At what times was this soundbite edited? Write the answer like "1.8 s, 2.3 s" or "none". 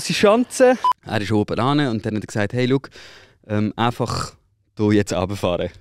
0.9 s